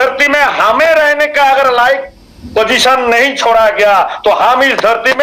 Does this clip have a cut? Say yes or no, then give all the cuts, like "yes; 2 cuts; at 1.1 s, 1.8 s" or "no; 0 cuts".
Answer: no; 0 cuts